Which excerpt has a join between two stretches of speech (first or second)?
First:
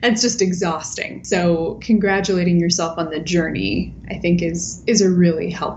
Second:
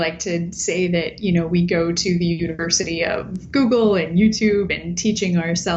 first